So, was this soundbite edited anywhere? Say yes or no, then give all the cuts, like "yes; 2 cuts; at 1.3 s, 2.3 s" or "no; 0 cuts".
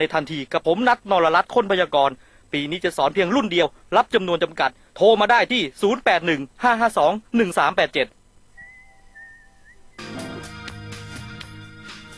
yes; 1 cut; at 9.9 s